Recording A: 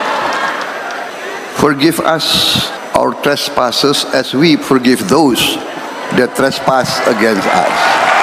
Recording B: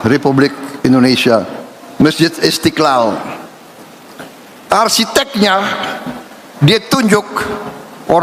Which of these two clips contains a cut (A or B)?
A